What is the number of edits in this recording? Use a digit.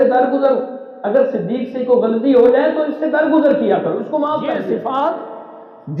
1